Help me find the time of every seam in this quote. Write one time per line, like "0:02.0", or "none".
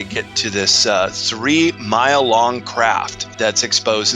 0:03.2